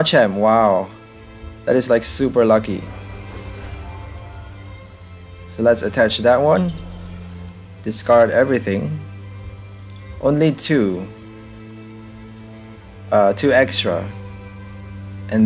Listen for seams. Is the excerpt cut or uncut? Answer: uncut